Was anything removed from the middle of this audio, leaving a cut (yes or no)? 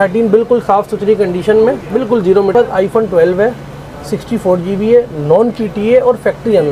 yes